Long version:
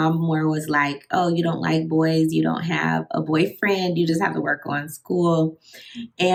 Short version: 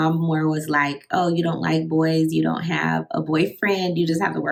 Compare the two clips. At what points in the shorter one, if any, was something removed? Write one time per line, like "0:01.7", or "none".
none